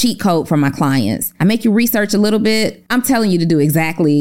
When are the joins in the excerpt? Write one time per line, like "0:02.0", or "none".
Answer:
0:01.3
0:02.8